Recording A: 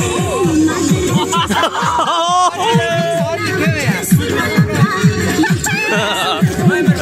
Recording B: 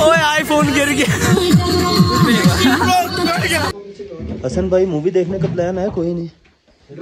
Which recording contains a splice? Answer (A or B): B